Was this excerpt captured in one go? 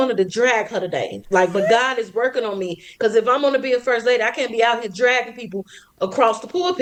yes; 0 cuts

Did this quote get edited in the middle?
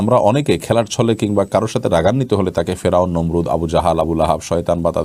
no; 0 cuts

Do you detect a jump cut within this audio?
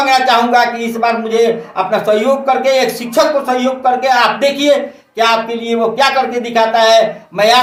no; 0 cuts

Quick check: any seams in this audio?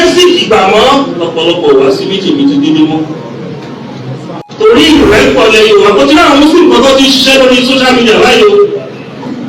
yes; 1 cut; at 4.5 s

